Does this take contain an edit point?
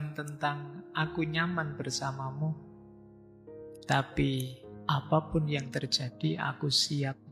no; 0 cuts

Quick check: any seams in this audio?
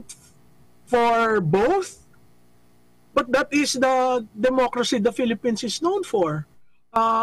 no; 0 cuts

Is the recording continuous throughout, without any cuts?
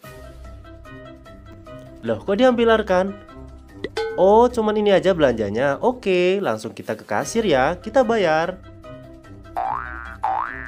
no; 1 cut; at 1.4 s

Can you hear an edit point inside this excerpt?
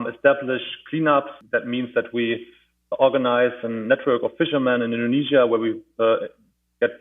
yes; 1 cut; at 1.4 s

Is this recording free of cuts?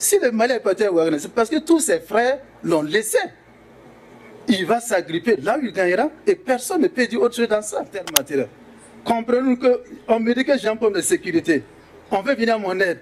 no; 1 cut; at 8.1 s

